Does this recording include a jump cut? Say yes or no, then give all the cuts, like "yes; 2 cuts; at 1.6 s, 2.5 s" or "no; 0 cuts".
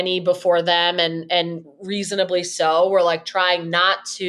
no; 0 cuts